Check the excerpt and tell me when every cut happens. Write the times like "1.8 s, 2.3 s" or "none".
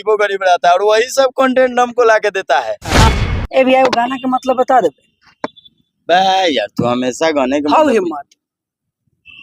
3.1 s